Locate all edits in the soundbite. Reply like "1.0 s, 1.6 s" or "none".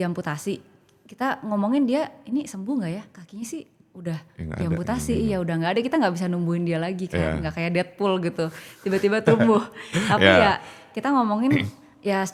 none